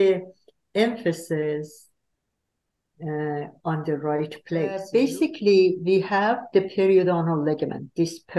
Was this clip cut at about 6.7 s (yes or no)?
no